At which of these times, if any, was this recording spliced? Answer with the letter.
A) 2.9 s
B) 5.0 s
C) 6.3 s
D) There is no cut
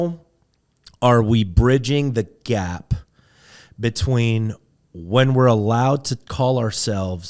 D